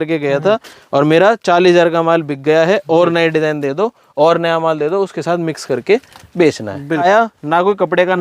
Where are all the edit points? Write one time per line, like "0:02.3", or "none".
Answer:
0:07.0